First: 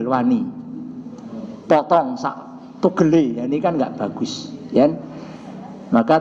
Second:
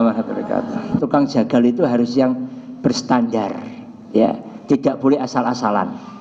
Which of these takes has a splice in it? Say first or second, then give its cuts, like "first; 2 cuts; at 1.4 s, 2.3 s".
second; 1 cut; at 1.0 s